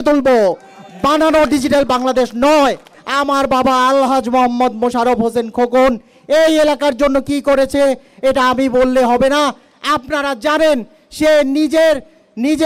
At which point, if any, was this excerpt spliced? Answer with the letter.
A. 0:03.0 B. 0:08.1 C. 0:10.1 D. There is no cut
A